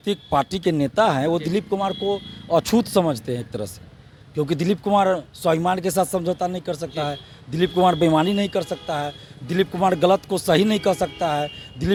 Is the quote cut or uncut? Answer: uncut